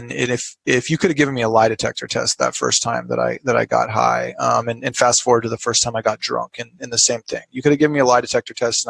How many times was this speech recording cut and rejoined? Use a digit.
0